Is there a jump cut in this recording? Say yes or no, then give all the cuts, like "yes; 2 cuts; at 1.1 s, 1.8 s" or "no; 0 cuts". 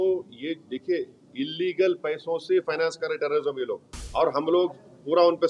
yes; 1 cut; at 3.9 s